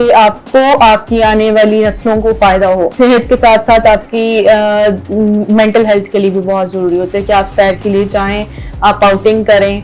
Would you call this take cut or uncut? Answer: cut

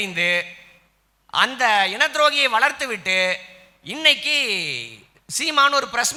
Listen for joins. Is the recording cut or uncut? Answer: uncut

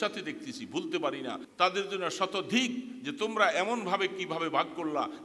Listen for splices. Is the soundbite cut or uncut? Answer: cut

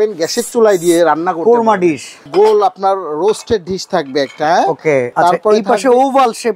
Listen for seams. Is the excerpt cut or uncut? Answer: cut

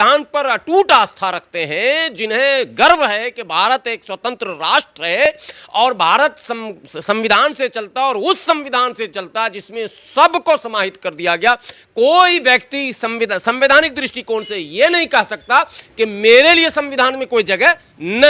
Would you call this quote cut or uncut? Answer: uncut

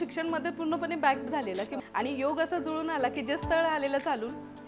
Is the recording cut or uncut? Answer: cut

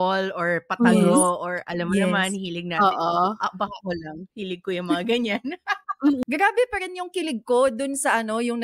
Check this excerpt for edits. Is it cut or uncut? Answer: cut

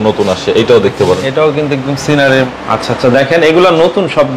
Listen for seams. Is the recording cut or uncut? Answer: cut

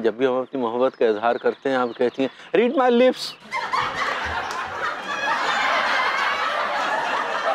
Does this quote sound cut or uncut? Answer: uncut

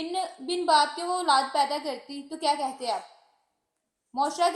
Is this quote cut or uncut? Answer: uncut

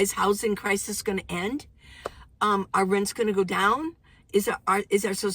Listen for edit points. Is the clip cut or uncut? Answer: uncut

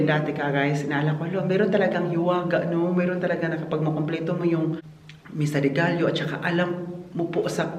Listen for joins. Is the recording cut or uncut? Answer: uncut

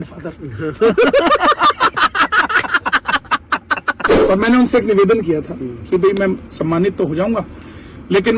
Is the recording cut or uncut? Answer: cut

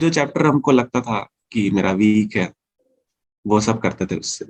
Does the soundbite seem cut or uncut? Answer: uncut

